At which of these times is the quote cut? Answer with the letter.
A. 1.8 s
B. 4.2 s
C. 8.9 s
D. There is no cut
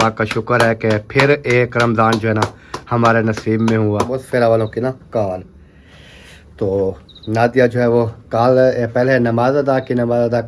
B